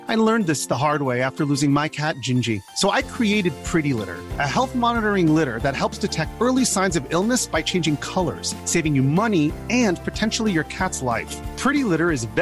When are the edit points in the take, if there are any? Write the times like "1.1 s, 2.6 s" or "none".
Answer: none